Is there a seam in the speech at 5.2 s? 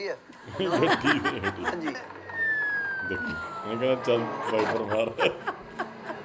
no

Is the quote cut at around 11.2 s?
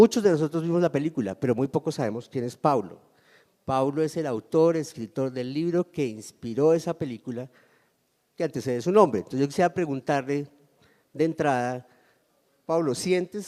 yes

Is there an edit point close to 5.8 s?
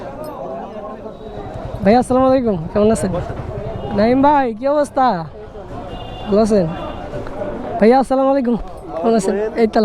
no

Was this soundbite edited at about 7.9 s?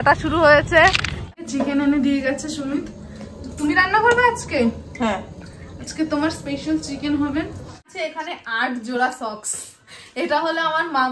yes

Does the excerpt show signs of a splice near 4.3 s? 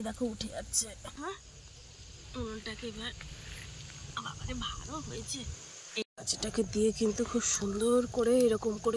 no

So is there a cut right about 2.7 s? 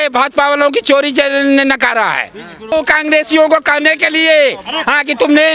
yes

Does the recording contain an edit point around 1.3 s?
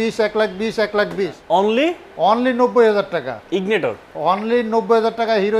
yes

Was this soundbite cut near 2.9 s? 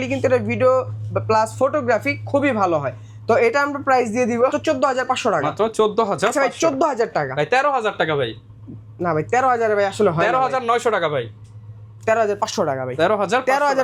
no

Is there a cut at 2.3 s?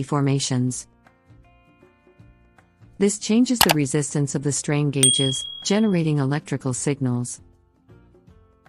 no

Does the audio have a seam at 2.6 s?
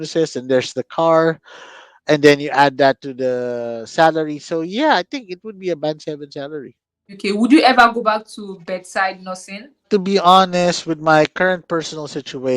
no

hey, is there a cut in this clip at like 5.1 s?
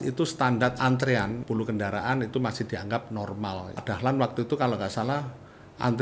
no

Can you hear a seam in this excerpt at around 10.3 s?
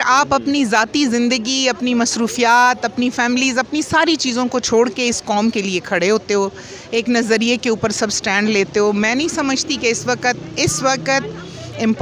no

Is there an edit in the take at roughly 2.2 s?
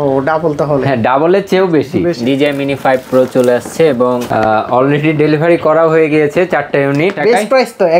yes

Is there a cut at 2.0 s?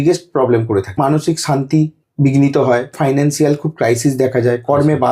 yes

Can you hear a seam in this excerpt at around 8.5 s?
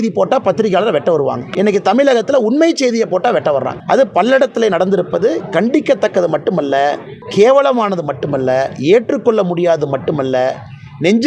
no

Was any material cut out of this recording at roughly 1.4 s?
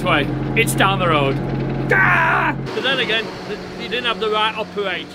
yes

